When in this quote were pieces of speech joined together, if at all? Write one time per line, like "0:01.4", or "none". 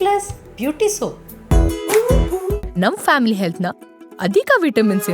0:01.3